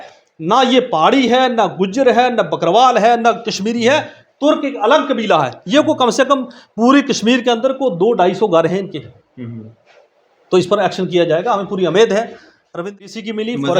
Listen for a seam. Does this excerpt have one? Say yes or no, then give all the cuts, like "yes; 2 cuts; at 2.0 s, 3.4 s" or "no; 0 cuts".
yes; 1 cut; at 12.9 s